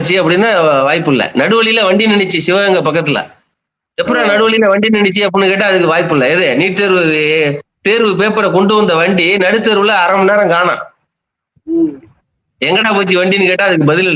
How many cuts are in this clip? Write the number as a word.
zero